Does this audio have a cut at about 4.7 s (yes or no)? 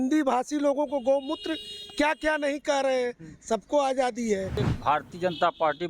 yes